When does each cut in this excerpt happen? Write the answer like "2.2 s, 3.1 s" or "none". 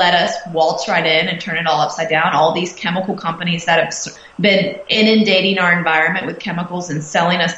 4.1 s